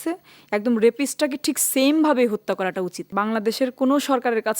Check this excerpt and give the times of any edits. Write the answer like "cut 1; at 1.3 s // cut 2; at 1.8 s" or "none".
cut 1; at 3.1 s